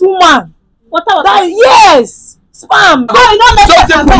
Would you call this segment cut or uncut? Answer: cut